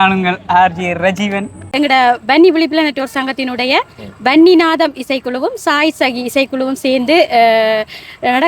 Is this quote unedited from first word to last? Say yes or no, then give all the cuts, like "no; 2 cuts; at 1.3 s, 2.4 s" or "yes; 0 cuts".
no; 1 cut; at 1.7 s